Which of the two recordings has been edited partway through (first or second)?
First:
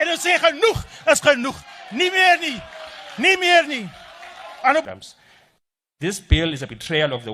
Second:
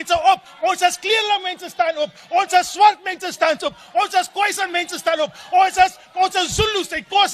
first